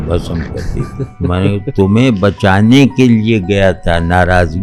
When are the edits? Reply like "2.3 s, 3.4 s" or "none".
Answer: none